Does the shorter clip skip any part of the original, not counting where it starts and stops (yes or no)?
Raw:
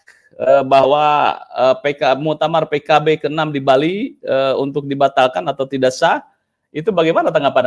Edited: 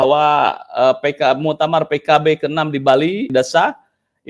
yes